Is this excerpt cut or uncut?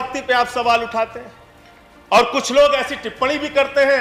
uncut